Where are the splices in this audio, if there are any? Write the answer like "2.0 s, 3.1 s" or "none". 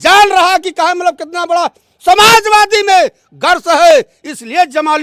none